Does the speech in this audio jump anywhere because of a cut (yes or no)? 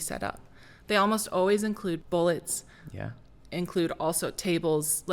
yes